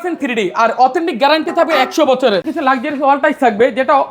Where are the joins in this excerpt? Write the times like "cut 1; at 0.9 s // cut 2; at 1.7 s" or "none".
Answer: cut 1; at 2.5 s